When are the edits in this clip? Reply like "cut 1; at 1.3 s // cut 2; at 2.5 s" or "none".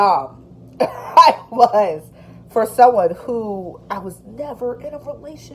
none